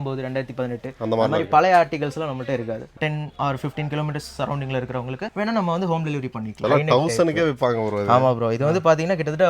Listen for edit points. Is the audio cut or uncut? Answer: cut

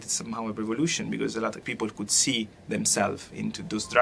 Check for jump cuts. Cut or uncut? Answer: cut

